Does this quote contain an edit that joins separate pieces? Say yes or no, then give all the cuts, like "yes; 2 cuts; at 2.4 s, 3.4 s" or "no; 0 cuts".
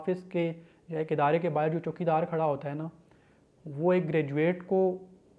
no; 0 cuts